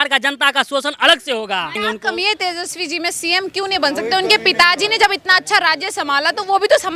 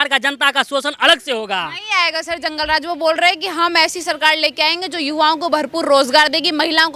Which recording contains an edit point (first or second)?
first